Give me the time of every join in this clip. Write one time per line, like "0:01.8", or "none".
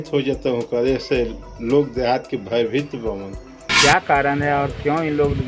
0:03.8